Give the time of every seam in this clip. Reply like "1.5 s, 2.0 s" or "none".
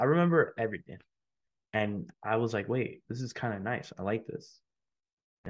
2.1 s, 3.0 s